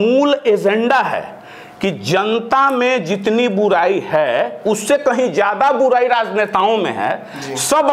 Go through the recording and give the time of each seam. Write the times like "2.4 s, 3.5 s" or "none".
none

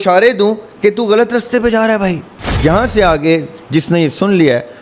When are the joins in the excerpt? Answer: 2.3 s

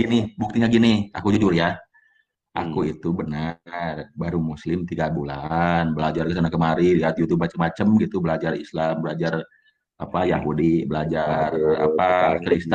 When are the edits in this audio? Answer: none

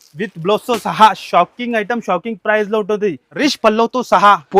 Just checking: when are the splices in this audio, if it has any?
3.3 s

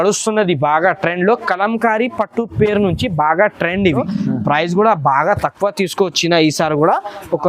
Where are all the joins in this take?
4.1 s

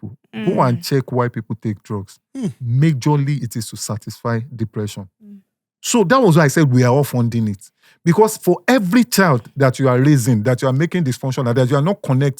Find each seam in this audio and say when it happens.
none

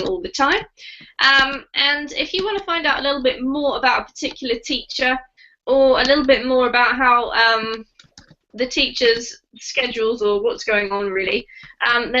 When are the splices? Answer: 4.9 s

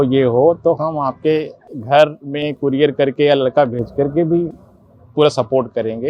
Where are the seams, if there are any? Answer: none

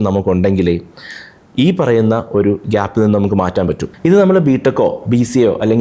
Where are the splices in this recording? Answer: 3.9 s

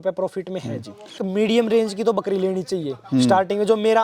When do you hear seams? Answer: 1.2 s

